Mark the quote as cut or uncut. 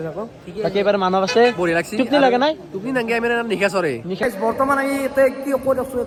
uncut